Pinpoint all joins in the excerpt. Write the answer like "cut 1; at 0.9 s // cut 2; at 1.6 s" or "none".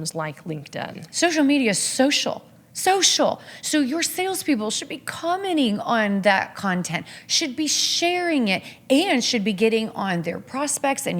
cut 1; at 1.0 s